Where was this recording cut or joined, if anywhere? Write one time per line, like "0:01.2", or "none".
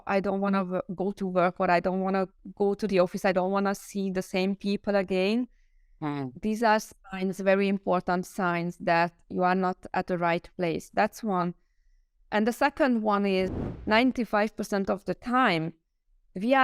0:13.6